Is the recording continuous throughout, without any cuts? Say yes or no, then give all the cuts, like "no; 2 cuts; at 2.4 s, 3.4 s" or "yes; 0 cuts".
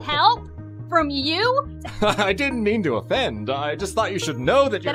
yes; 0 cuts